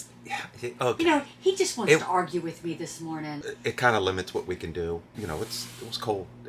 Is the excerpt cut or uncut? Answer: uncut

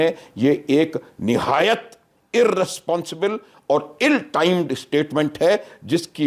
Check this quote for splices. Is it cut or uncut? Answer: uncut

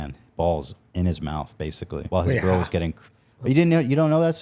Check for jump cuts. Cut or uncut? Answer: cut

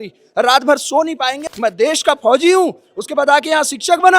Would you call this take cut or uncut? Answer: cut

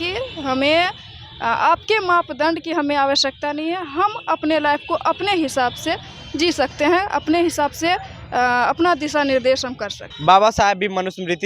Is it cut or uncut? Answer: cut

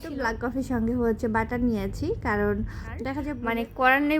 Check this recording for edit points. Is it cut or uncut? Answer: cut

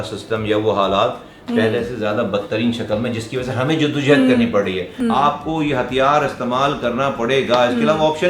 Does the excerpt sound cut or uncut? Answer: cut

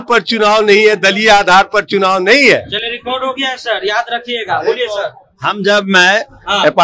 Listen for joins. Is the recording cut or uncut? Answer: uncut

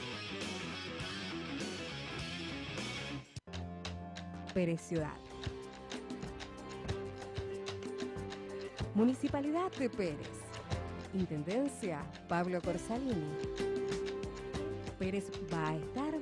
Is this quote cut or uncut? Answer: cut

